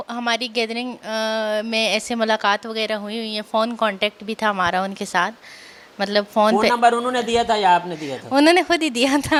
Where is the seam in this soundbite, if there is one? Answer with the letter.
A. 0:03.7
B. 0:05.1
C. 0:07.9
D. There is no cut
D